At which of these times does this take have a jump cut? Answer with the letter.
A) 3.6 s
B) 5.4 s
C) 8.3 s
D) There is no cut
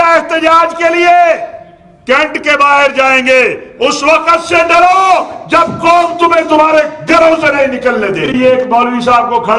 C